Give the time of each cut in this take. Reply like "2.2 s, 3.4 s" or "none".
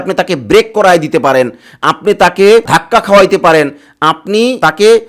none

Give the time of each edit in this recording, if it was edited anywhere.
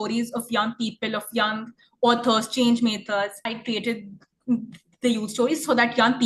3.5 s

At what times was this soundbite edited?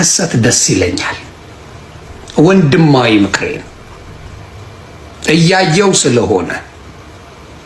none

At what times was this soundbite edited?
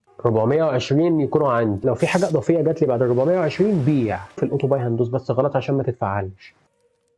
4.4 s

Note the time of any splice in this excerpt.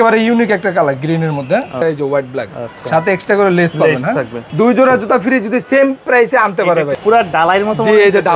1.8 s, 4.4 s, 7.0 s

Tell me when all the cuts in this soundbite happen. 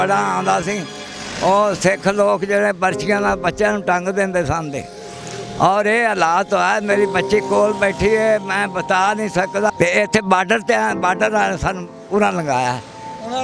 9.7 s

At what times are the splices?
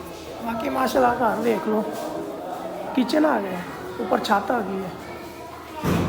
none

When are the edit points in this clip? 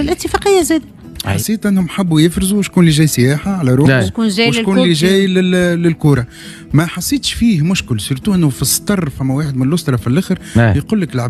1.3 s

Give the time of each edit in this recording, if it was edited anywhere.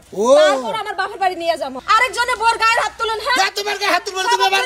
1.8 s

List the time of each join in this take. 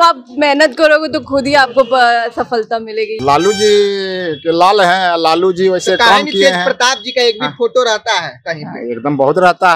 3.1 s

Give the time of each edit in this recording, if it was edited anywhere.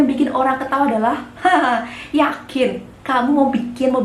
none

